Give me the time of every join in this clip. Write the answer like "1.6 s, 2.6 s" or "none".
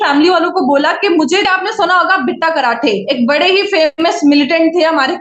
1.4 s